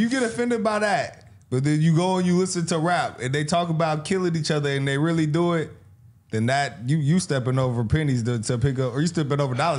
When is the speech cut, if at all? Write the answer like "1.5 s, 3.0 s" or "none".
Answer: none